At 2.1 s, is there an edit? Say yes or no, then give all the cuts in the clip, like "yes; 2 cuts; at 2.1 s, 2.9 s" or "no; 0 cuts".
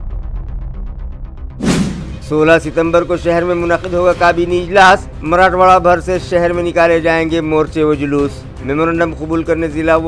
yes; 1 cut; at 2.1 s